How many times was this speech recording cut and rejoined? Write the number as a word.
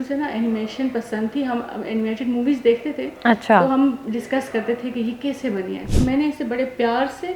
one